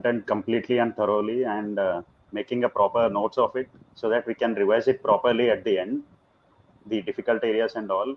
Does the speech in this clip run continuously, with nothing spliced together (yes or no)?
yes